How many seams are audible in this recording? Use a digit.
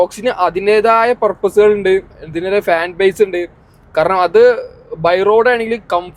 0